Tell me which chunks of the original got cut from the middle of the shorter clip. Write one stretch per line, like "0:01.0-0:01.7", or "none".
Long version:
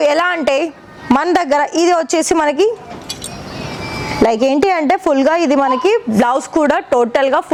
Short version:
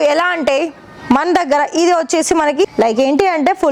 0:02.6-0:04.1